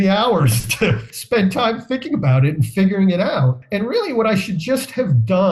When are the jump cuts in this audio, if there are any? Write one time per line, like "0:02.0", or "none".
0:01.1
0:03.6